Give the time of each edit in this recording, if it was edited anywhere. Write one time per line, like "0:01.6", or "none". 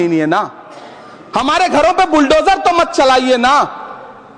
none